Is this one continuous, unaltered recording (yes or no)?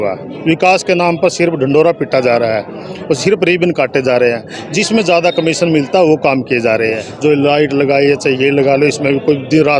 no